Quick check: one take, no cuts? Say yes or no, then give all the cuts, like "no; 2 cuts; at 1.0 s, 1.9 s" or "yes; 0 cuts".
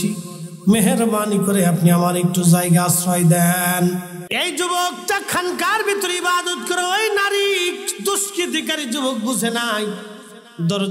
no; 1 cut; at 4.1 s